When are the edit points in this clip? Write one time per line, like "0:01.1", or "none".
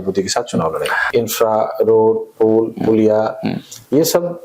0:01.0